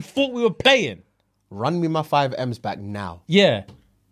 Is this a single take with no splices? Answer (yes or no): yes